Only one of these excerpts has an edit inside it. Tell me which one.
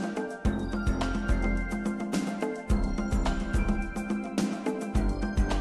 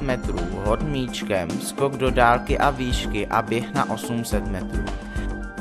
second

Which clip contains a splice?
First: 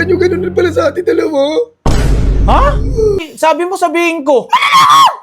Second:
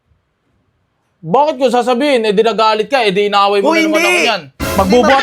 first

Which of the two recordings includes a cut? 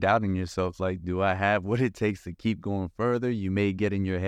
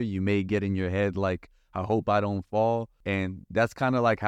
second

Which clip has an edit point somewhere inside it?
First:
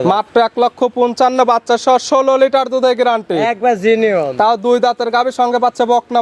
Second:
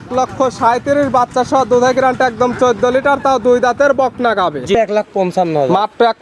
second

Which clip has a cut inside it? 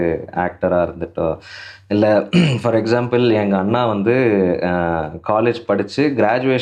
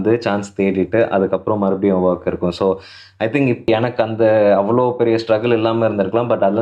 second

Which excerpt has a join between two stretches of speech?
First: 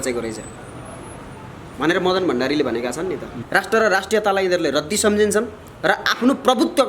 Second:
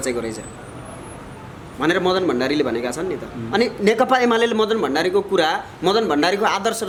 first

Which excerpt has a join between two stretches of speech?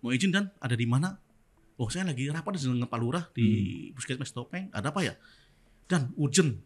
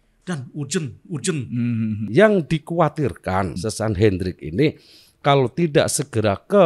second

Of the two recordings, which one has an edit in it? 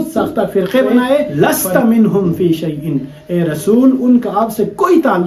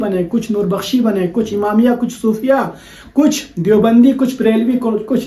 first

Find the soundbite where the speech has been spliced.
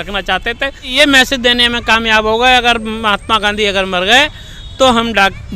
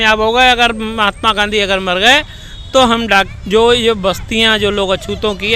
first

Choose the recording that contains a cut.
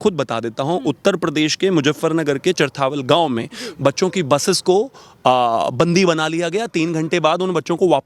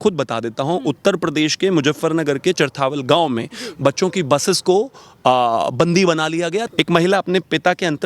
second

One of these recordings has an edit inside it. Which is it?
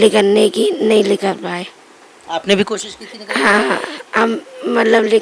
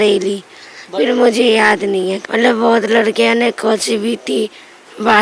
second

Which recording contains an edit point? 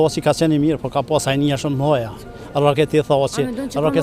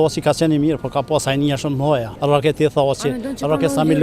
second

